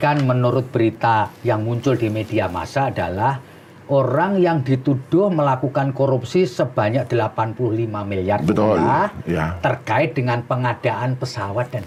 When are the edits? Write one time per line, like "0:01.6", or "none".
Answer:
none